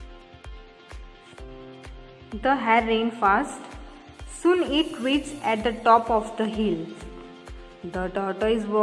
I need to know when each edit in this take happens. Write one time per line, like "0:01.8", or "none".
0:02.0